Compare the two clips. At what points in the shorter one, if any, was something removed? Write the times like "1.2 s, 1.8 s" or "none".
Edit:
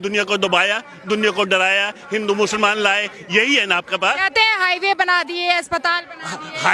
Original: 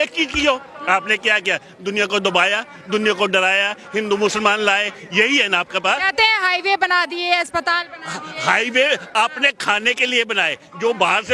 none